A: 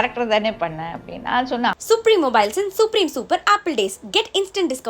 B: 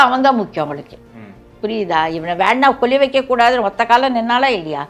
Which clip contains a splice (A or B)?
A